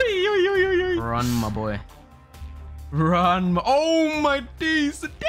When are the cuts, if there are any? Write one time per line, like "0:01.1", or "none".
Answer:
0:01.0